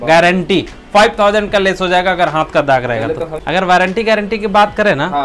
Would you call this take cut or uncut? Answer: cut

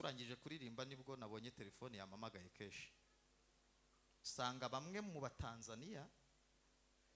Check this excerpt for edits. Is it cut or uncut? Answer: uncut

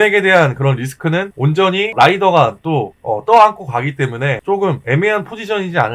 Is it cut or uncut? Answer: cut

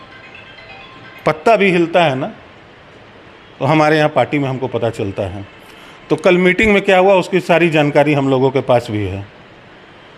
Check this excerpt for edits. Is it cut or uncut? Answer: uncut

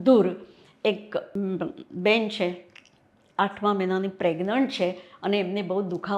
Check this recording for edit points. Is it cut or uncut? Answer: cut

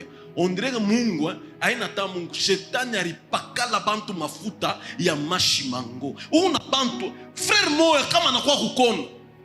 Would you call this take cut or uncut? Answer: uncut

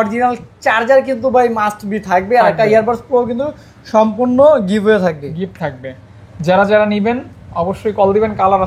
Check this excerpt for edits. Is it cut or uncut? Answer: uncut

